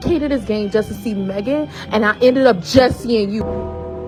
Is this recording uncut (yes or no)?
yes